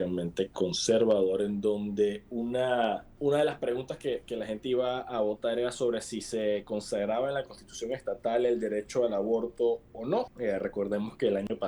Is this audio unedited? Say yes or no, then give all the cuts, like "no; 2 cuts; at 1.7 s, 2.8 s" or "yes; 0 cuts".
no; 2 cuts; at 3.1 s, 10.3 s